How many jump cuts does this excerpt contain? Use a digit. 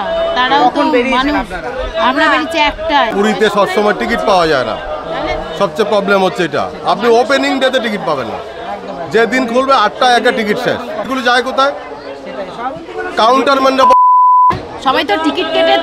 3